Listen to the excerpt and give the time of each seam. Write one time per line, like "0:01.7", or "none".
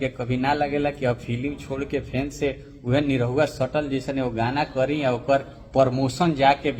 none